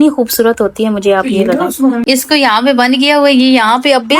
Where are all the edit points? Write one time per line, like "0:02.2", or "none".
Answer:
0:02.0